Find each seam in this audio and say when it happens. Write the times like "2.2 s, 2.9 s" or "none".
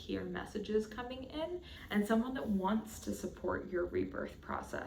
1.7 s